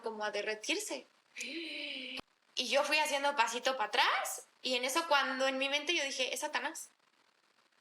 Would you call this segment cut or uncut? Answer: cut